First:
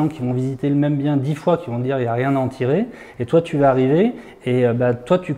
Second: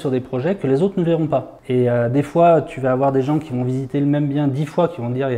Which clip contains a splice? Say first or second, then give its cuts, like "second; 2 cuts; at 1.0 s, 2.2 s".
second; 1 cut; at 1.6 s